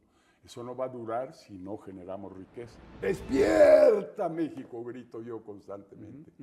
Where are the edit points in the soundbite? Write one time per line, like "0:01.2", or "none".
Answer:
0:02.8